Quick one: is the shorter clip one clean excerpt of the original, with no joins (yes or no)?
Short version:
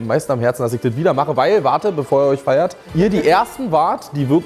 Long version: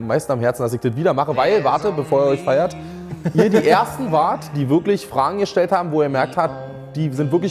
no